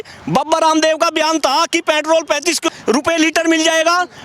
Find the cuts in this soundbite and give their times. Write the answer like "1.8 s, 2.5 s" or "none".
2.8 s